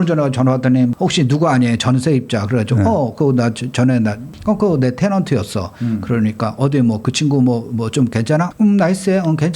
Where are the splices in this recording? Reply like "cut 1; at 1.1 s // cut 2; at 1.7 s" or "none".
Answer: cut 1; at 0.9 s // cut 2; at 4.3 s // cut 3; at 8.5 s